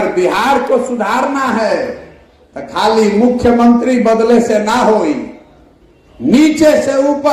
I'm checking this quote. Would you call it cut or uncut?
uncut